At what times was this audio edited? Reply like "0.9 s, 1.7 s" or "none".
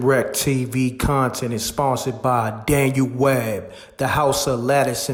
none